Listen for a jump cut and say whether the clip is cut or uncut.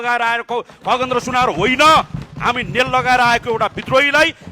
uncut